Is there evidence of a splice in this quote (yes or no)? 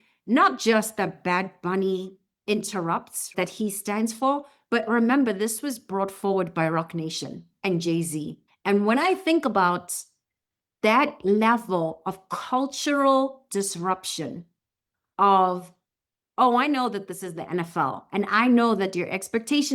yes